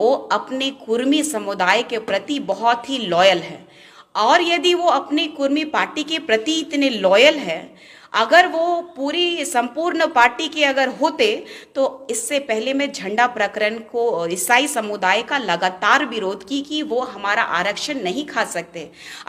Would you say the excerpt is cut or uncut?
uncut